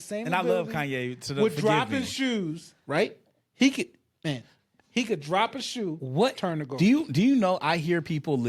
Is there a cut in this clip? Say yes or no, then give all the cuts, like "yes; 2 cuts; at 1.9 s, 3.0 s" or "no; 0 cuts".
no; 0 cuts